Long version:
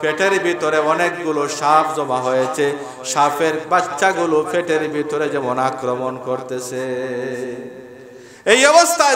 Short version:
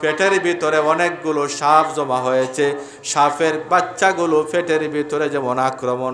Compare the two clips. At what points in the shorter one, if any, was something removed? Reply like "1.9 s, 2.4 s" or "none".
none